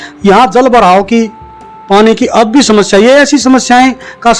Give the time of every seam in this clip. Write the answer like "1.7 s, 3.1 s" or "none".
none